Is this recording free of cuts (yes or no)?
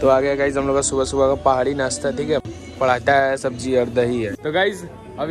yes